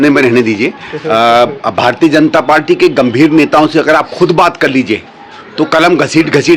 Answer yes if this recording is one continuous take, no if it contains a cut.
yes